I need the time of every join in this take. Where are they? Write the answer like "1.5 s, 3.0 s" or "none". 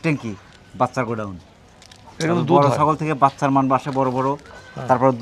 none